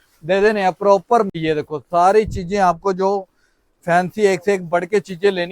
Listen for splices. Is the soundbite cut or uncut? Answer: cut